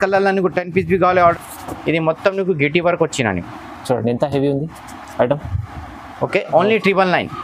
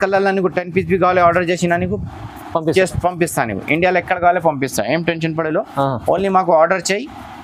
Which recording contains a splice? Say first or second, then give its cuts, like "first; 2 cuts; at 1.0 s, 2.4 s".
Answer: first; 1 cut; at 1.3 s